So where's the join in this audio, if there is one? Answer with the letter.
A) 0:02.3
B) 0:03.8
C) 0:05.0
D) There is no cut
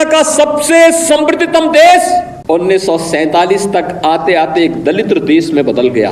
A